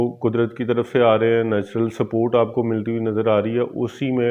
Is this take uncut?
yes; 0 cuts

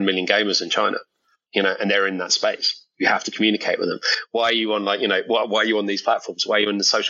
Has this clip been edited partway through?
no; 0 cuts

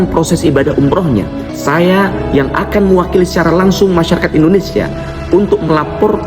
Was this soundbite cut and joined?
yes; 1 cut; at 1.4 s

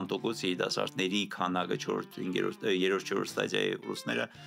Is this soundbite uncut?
yes; 0 cuts

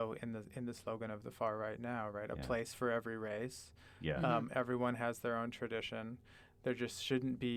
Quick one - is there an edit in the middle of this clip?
no; 0 cuts

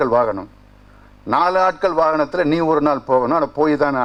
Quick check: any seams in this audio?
no; 0 cuts

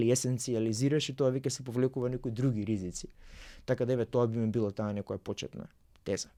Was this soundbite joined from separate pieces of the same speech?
no; 0 cuts

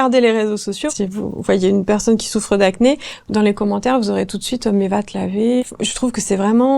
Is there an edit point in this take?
yes; 2 cuts; at 0.9 s, 5.6 s

